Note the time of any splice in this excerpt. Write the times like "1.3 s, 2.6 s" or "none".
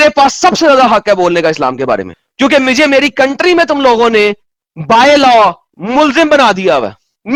none